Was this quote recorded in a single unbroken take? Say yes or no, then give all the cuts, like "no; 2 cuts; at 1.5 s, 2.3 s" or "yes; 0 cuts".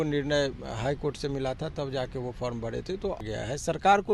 no; 1 cut; at 3.2 s